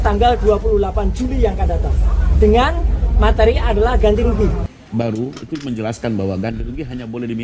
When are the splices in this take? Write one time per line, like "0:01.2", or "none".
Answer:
0:04.6